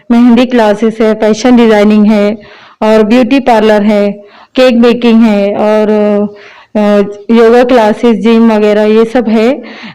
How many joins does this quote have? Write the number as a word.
zero